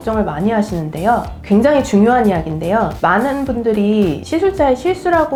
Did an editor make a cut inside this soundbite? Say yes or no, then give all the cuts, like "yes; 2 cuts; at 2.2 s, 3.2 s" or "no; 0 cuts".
no; 0 cuts